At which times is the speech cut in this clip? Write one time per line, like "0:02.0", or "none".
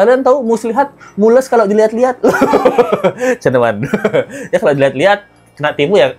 none